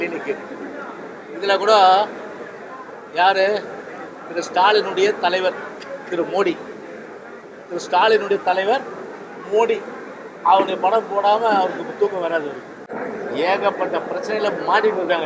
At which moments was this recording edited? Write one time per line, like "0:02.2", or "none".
0:12.8